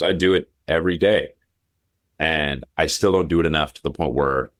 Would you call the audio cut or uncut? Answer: uncut